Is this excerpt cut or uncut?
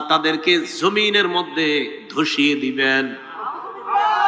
uncut